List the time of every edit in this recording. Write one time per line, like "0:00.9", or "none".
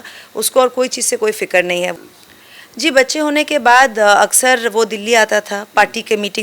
0:01.9